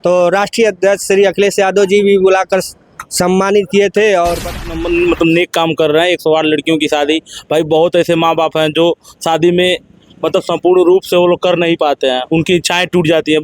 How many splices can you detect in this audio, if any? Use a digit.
1